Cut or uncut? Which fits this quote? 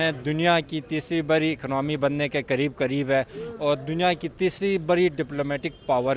uncut